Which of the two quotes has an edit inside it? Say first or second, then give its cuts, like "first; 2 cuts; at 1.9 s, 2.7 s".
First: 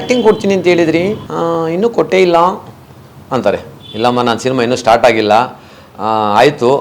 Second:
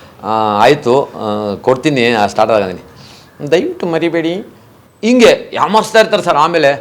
first; 1 cut; at 1.2 s